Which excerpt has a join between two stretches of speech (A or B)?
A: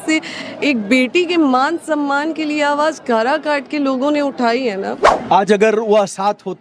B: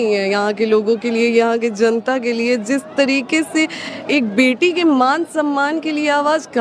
A